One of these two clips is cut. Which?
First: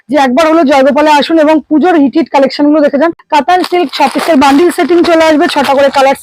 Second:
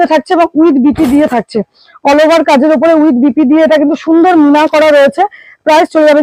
first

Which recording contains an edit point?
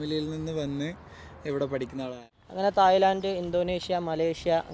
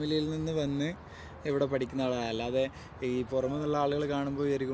first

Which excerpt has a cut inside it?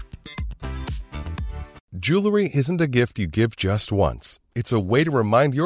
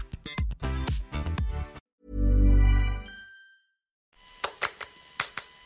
first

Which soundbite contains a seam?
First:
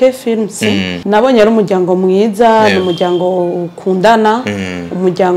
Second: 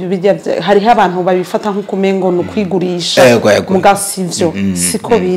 first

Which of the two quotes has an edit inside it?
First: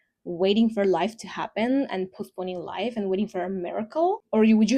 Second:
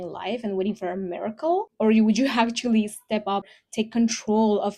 second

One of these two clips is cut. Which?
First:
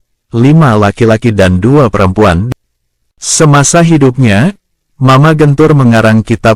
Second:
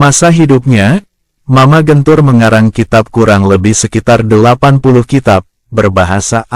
first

